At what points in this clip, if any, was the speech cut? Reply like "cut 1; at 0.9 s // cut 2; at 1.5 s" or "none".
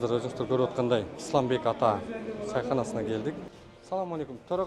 cut 1; at 1.2 s // cut 2; at 3.5 s

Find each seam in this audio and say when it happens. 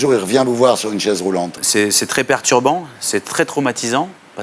cut 1; at 1.5 s

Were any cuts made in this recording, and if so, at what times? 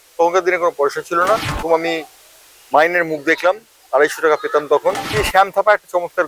cut 1; at 1.6 s // cut 2; at 5.1 s

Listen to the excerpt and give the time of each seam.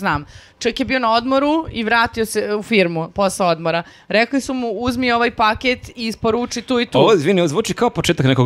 none

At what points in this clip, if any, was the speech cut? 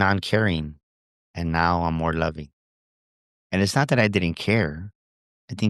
none

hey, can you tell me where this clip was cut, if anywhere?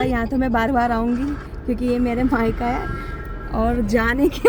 none

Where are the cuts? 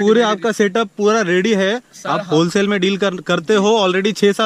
none

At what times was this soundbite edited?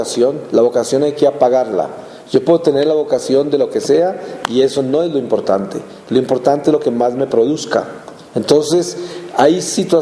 none

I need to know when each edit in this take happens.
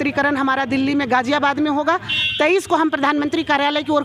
none

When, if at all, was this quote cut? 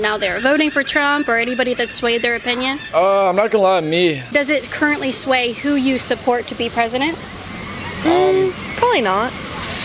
cut 1; at 4.2 s

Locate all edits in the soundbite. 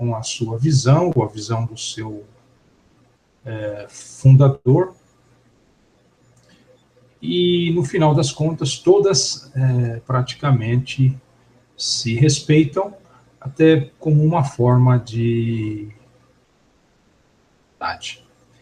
none

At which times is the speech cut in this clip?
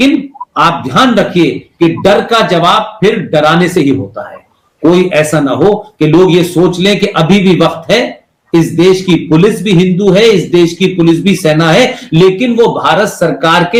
none

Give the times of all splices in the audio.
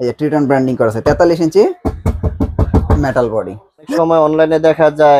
cut 1; at 3.9 s

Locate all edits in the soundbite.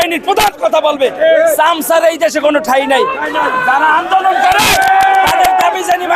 none

